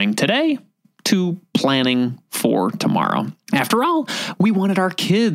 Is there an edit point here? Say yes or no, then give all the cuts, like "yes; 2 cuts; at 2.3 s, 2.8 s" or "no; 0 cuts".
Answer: yes; 1 cut; at 3.4 s